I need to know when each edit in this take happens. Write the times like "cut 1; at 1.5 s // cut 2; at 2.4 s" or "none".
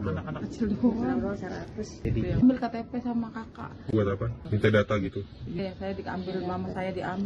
cut 1; at 2.0 s // cut 2; at 4.4 s